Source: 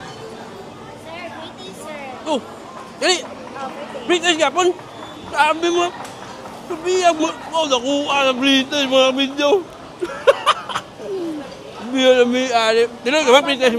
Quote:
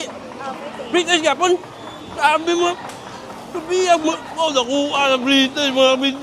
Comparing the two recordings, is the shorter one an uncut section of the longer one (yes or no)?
yes